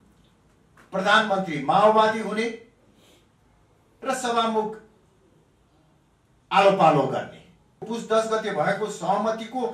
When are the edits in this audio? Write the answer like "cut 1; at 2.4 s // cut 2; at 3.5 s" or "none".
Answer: cut 1; at 7.9 s